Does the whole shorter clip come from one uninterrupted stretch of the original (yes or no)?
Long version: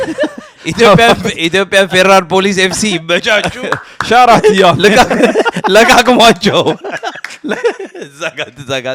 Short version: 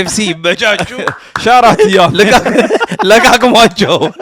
yes